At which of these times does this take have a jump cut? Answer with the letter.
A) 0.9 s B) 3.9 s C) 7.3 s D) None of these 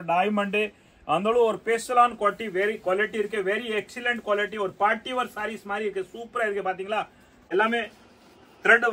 C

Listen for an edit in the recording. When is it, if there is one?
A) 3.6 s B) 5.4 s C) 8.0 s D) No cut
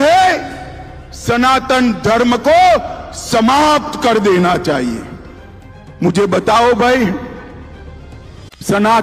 D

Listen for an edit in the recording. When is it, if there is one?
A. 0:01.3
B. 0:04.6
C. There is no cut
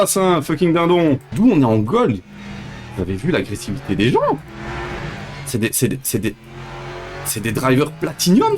A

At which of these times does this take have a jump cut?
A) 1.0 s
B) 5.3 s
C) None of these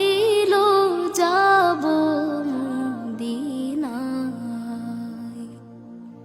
A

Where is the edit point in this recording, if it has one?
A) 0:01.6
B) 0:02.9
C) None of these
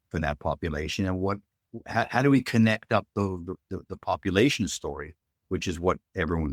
C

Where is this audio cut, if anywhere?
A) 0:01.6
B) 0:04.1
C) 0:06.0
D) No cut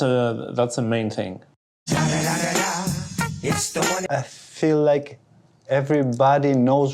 B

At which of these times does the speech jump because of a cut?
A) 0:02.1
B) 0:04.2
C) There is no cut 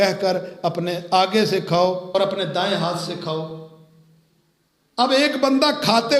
A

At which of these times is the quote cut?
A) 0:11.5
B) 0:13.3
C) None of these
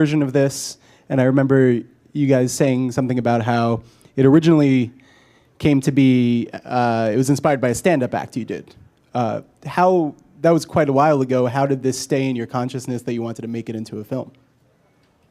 B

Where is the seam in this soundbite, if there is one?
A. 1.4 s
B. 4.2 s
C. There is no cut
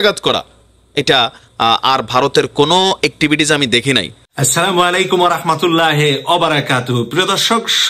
B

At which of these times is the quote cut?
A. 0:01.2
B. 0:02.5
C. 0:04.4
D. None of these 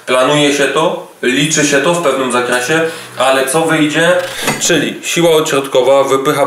C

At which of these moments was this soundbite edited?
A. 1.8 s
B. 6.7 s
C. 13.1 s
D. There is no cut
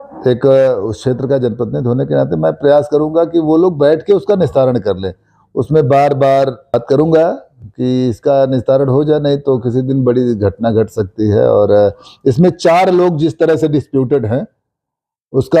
B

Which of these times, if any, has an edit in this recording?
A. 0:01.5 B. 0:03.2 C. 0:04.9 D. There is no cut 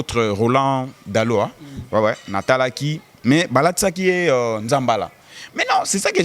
D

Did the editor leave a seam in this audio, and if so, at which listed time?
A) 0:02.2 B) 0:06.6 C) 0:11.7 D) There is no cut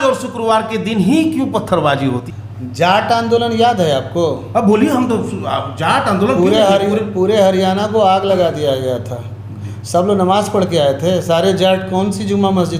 A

